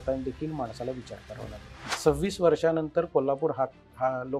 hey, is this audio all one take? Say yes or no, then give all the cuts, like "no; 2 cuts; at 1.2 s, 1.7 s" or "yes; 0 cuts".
no; 1 cut; at 1.8 s